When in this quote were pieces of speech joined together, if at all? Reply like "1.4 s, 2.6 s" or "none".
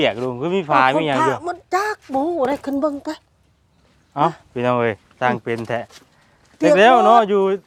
none